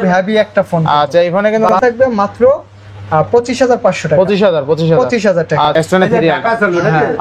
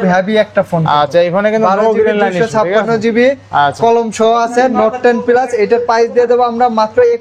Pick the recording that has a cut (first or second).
first